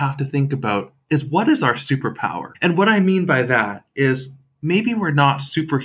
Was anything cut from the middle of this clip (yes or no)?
yes